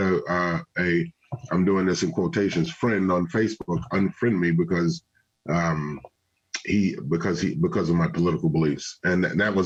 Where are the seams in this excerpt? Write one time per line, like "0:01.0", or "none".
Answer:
none